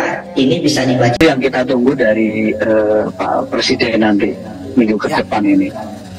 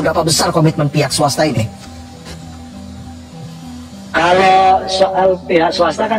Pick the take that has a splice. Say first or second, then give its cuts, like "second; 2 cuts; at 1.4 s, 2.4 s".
first; 1 cut; at 1.2 s